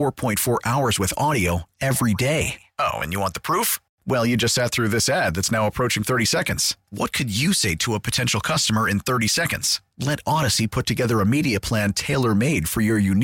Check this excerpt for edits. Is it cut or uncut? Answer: uncut